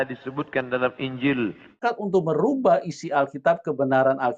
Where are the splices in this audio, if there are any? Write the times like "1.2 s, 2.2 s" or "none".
1.8 s